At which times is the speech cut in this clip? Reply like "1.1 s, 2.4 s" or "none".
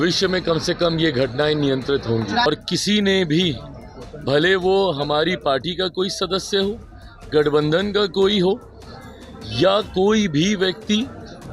2.5 s